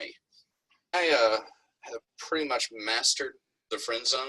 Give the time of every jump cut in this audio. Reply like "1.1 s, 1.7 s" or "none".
0.9 s